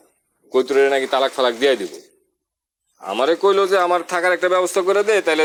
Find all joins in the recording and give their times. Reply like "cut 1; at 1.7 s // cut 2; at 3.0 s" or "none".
none